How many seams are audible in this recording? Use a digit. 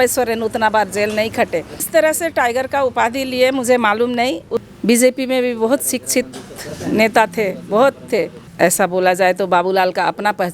3